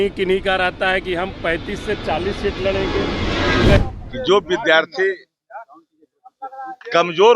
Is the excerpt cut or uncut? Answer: cut